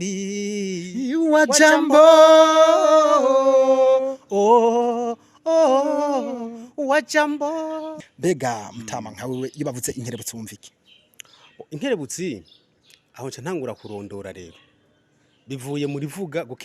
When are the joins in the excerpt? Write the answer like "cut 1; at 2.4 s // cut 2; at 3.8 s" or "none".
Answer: cut 1; at 8.0 s